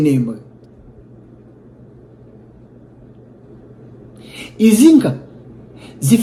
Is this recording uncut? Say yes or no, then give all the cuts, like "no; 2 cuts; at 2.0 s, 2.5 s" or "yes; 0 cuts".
yes; 0 cuts